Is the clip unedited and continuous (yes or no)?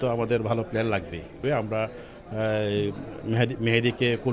no